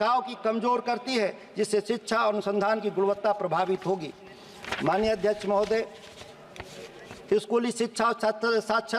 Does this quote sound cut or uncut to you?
uncut